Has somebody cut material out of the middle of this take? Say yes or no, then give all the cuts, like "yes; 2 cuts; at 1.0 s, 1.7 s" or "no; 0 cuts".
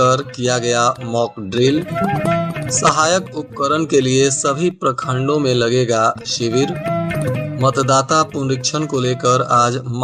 no; 0 cuts